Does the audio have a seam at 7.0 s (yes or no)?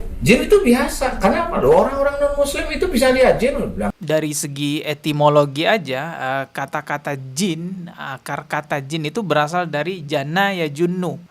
no